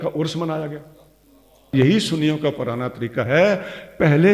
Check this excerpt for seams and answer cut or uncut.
cut